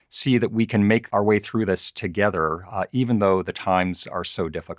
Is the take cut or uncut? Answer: cut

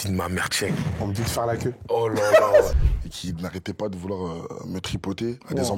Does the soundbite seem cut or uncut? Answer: cut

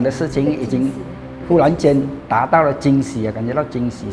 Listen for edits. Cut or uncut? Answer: uncut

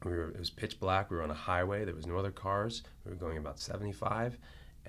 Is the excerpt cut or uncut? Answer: uncut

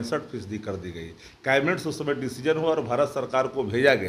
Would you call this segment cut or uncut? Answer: uncut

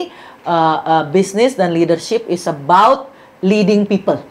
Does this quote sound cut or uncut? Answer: uncut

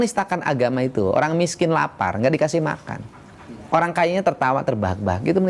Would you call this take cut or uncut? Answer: uncut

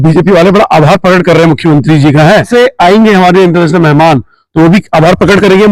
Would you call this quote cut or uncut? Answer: cut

